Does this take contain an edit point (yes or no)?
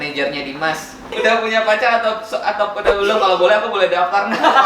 yes